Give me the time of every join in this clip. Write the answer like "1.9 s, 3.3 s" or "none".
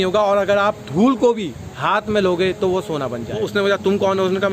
3.4 s

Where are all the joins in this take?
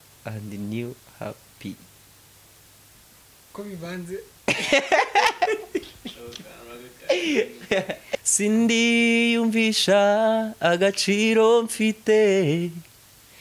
8.1 s

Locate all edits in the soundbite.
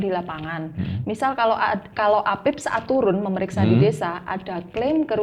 none

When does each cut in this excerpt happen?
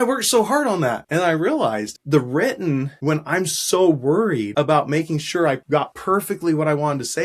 1.0 s, 1.9 s, 2.9 s, 4.5 s, 5.8 s

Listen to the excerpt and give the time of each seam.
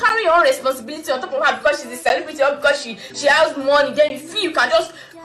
none

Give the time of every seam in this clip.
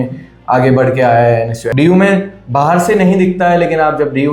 1.6 s

